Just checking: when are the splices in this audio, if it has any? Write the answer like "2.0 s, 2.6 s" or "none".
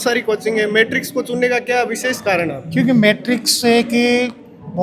none